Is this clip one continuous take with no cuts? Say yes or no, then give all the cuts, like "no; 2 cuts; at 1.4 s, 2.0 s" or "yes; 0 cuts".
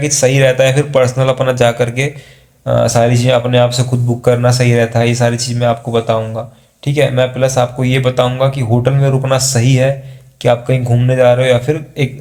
yes; 0 cuts